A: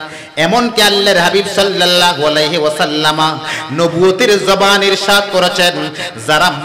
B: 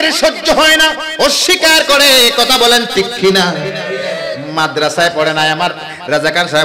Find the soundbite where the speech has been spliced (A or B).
B